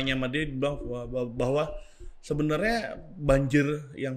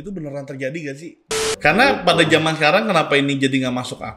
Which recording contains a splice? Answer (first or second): second